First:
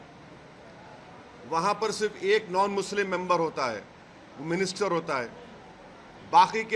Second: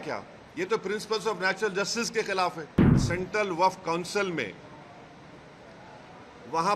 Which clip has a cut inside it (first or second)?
second